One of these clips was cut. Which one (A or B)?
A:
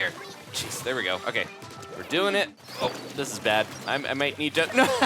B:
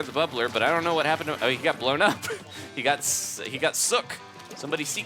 A